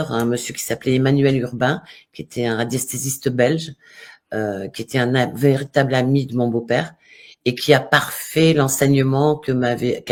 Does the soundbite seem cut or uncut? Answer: uncut